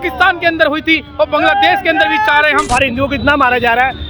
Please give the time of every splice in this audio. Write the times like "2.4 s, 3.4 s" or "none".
2.7 s